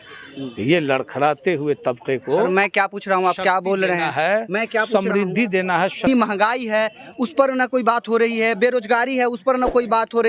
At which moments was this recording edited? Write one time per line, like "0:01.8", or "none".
0:06.1